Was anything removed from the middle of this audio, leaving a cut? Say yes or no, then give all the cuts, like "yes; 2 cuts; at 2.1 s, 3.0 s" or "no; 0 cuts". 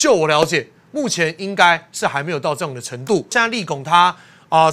yes; 1 cut; at 3.3 s